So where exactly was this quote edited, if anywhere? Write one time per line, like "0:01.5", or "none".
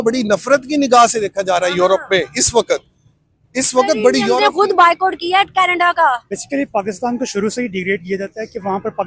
0:06.3